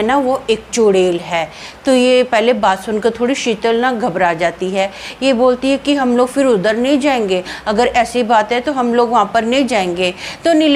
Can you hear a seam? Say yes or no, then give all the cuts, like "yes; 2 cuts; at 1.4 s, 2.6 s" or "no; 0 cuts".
no; 0 cuts